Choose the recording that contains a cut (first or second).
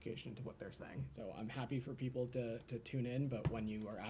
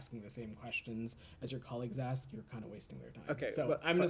first